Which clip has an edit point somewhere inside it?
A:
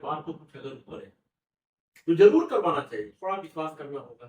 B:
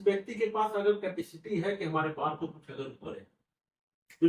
A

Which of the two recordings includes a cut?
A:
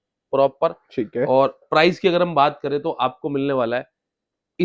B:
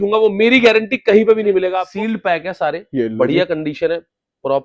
B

